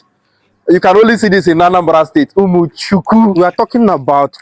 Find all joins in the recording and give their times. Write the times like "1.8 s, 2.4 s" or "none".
3.3 s

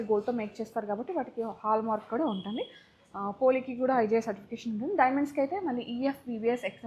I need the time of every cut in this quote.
none

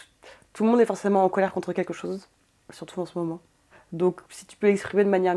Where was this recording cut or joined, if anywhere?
3.8 s

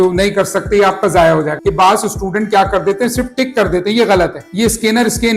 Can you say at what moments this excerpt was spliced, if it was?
1.5 s, 4.4 s

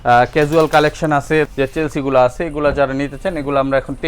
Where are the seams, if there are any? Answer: 1.5 s

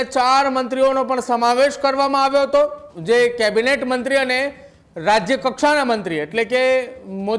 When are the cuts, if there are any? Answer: 2.9 s

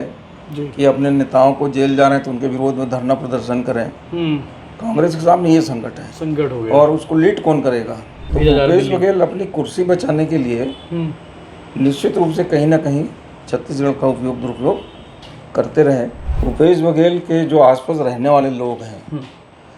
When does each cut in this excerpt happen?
8.2 s, 16.2 s

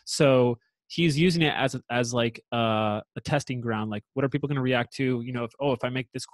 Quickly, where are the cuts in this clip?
none

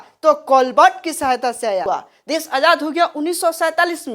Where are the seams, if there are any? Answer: 1.8 s

